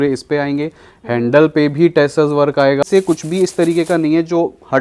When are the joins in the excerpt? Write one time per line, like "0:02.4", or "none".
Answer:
0:02.8